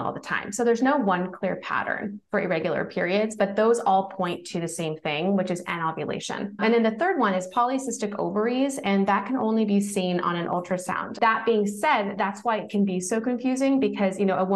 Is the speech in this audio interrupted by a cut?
yes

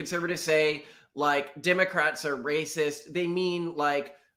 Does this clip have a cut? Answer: no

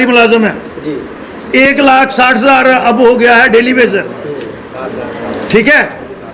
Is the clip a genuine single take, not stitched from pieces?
yes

